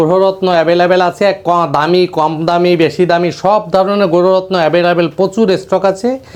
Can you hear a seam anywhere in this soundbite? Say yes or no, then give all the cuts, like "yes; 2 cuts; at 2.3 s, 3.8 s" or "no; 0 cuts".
no; 0 cuts